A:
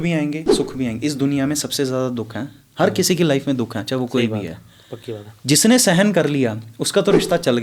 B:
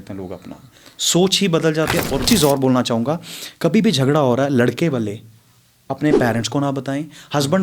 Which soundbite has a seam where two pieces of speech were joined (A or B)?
B